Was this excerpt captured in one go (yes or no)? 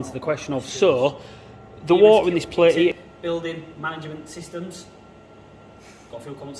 no